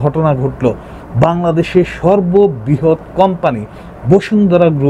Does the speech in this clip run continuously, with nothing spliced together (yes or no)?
yes